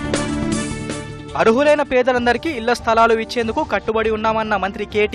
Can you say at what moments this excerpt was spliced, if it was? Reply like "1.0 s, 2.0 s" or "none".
1.1 s